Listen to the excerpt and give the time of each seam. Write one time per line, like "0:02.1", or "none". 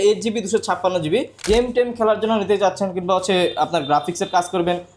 0:01.4